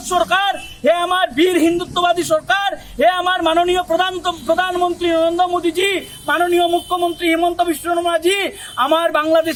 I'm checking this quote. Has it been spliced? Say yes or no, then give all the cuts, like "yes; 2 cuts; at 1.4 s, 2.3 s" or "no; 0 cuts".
no; 0 cuts